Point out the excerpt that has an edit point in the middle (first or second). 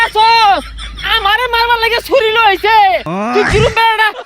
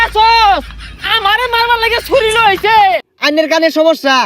second